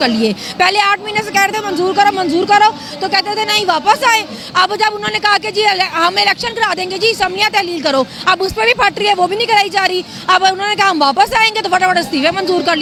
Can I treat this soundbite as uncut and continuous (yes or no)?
yes